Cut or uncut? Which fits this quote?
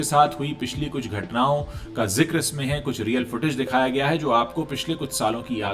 uncut